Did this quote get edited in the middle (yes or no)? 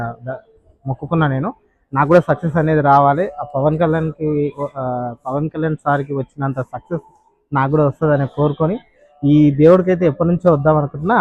no